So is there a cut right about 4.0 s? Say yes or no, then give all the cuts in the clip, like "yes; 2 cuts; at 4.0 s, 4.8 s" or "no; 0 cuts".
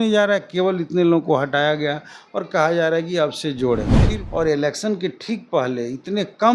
yes; 1 cut; at 4.0 s